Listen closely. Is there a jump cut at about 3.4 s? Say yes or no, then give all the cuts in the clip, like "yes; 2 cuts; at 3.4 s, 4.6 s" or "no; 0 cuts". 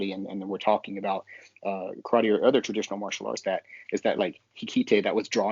yes; 1 cut; at 3.4 s